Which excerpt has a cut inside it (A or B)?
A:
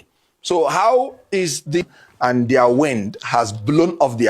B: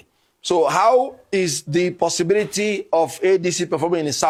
A